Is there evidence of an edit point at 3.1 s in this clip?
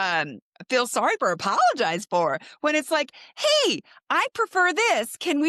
no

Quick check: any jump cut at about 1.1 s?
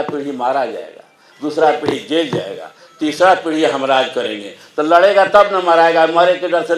no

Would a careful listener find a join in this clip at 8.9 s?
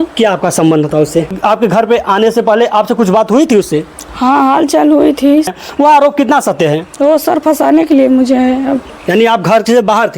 yes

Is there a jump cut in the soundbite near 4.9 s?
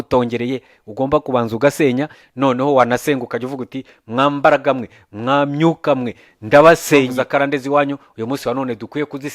no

